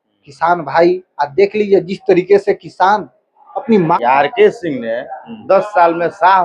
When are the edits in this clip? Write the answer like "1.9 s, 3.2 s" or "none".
4.0 s